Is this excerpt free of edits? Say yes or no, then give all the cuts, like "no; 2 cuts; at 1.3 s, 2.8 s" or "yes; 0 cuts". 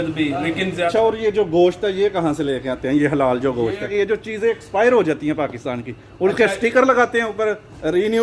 no; 2 cuts; at 0.9 s, 3.9 s